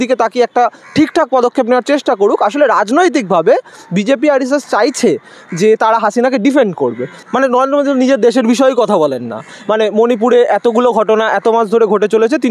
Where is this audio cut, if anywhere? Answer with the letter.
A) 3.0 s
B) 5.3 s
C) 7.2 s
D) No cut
C